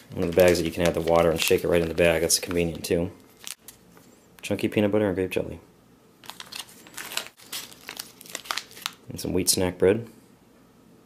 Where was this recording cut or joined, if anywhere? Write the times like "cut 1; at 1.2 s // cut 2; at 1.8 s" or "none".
cut 1; at 9.6 s

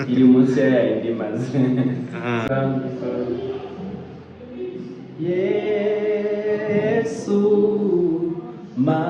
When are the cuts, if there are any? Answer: cut 1; at 2.5 s

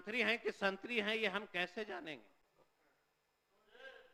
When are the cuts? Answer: none

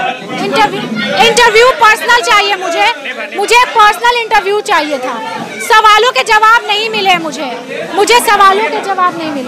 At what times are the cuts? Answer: none

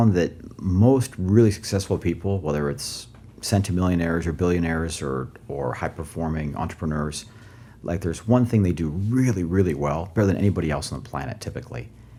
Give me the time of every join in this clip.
none

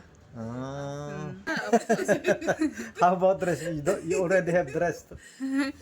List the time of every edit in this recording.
cut 1; at 1.7 s

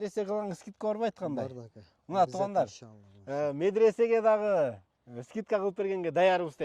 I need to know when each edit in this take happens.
none

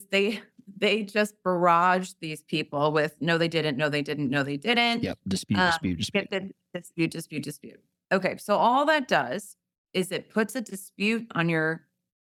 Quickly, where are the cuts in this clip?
none

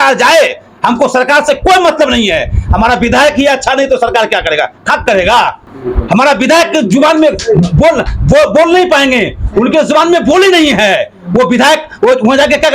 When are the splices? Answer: none

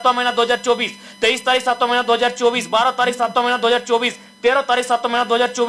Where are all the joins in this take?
none

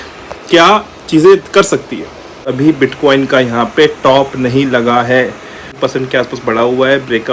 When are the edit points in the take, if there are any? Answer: cut 1; at 2.5 s // cut 2; at 5.7 s

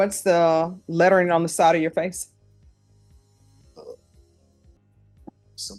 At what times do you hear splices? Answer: none

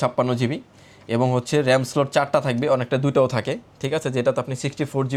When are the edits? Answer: none

